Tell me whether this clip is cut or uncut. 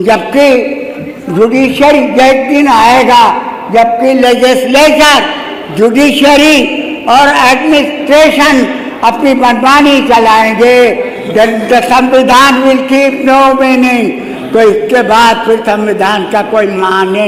uncut